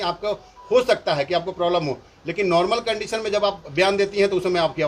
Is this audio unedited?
yes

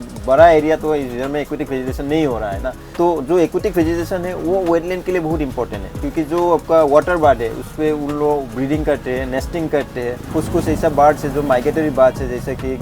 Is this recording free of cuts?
no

